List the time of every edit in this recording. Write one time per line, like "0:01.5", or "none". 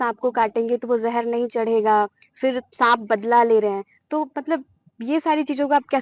none